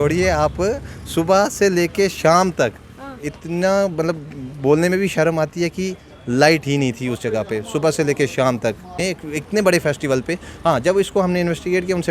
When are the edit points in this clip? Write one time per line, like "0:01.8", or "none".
0:09.0